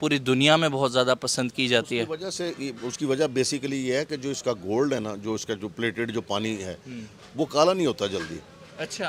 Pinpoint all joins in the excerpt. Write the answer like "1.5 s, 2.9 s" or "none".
none